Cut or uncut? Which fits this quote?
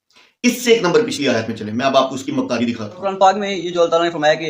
cut